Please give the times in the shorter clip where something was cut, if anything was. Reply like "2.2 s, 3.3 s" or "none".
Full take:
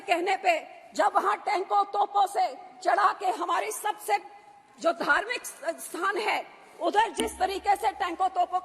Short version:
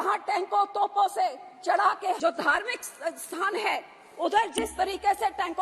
2.2 s